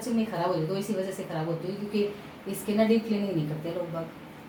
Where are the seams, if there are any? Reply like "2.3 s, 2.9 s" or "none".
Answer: none